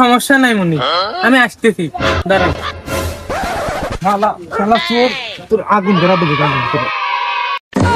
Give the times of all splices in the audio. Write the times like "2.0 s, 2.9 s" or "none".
none